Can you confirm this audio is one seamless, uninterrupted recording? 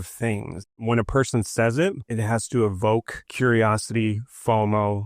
no; 3 cuts; at 0.8 s, 2.0 s, 3.2 s

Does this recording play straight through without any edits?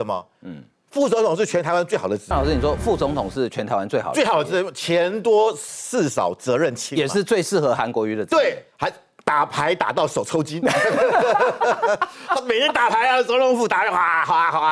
yes; 0 cuts

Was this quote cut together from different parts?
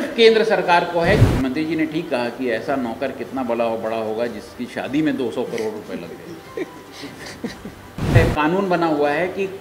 yes; 2 cuts; at 1.2 s, 8.1 s

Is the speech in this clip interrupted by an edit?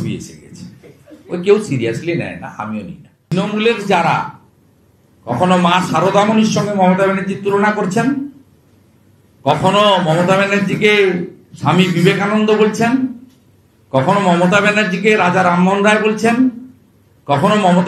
yes; 1 cut; at 3.1 s

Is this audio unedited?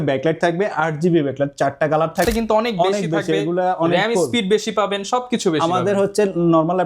no; 1 cut; at 2.2 s

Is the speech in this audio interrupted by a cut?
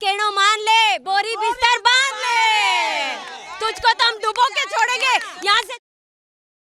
no; 0 cuts

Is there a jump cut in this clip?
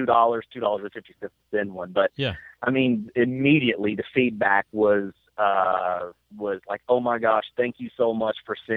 no; 0 cuts

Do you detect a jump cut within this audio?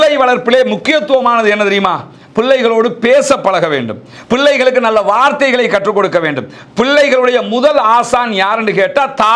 no; 0 cuts

